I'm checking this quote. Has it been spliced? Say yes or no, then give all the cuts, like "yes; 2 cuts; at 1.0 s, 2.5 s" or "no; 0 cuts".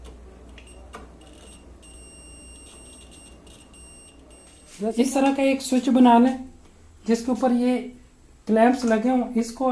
yes; 1 cut; at 4.6 s